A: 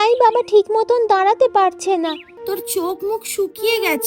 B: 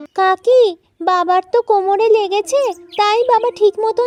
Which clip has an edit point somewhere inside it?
A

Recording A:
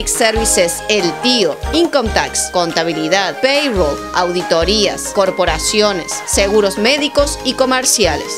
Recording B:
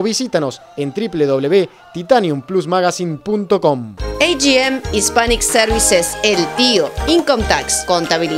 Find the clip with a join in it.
B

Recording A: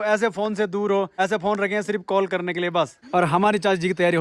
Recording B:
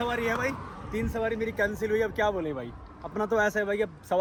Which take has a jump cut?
A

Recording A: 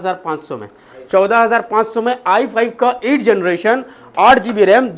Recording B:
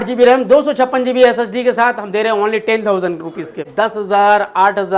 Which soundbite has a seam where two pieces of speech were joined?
B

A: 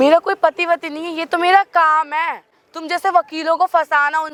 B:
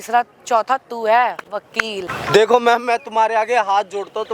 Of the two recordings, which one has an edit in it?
B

